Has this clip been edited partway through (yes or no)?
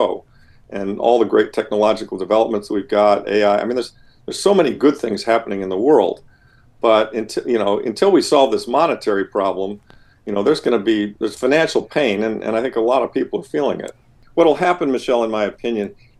yes